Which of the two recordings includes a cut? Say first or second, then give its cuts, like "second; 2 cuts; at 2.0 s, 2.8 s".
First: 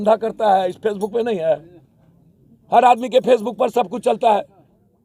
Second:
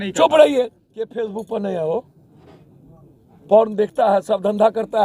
second; 1 cut; at 1.1 s